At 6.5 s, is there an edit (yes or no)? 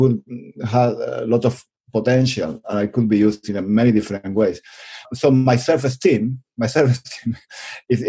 no